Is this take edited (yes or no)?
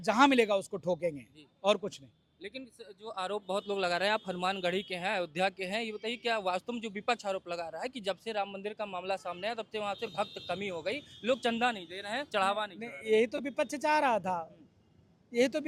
no